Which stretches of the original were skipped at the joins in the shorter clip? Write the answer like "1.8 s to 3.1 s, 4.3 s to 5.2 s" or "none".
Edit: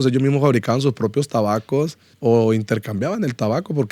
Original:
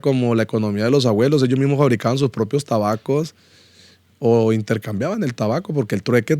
3.4 s to 4.0 s